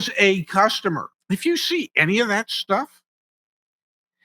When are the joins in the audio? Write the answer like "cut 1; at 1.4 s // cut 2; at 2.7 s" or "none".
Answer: cut 1; at 1.1 s